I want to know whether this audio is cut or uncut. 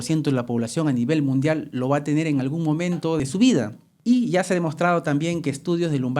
cut